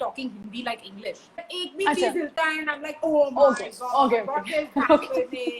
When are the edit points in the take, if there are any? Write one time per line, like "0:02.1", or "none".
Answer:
0:01.5

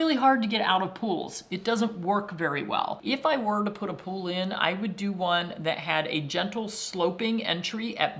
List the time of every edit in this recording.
none

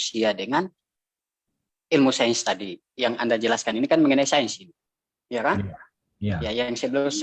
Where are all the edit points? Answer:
none

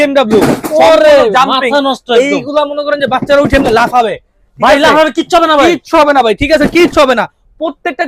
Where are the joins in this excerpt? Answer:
none

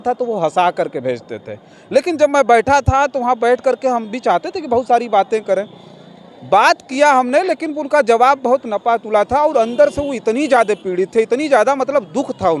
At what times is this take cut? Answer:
none

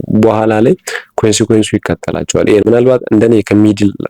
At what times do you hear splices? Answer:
0:02.6

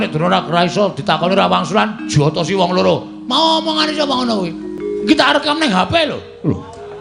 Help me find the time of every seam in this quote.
0:04.7

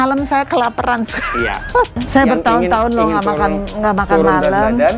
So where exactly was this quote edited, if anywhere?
0:02.0

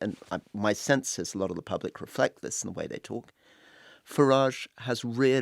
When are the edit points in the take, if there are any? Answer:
none

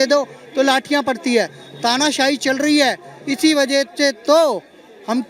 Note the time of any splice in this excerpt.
none

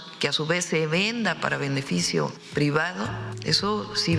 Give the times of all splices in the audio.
0:02.4
0:03.3

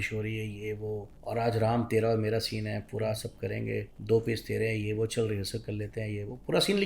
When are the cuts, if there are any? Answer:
0:01.1
0:03.9

